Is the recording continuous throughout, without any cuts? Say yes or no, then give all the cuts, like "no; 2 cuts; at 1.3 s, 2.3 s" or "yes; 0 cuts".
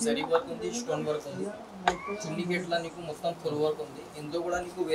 yes; 0 cuts